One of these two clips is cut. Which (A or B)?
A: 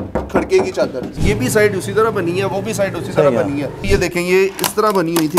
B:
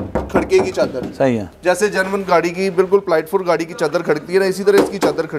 A